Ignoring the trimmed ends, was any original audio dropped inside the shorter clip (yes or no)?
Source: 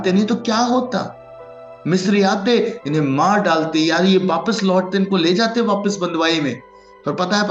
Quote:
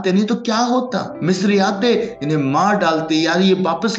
yes